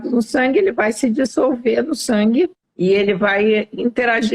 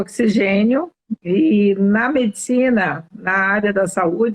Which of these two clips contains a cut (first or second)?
first